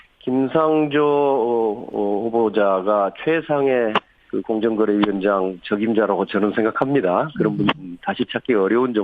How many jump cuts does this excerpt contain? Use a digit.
1